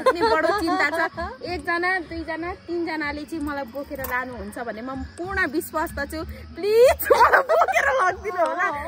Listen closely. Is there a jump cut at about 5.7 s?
no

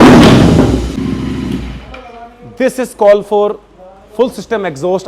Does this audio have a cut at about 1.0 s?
yes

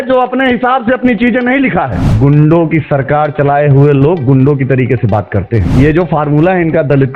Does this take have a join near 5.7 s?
yes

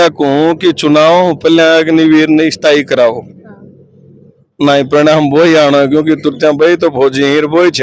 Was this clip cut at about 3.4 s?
no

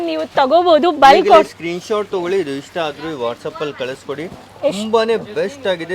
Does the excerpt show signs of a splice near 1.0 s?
no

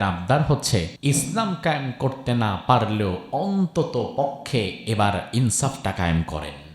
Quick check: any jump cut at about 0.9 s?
yes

